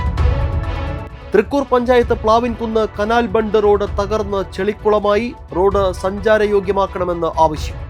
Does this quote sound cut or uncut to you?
uncut